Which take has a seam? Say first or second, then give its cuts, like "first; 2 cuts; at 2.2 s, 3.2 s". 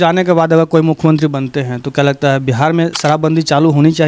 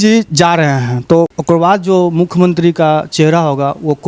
second; 1 cut; at 1.4 s